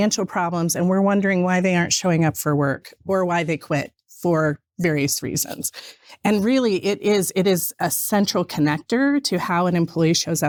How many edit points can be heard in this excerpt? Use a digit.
0